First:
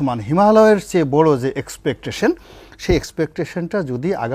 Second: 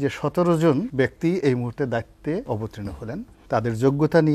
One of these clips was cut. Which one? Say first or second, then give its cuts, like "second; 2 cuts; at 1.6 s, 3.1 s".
second; 2 cuts; at 0.9 s, 2.8 s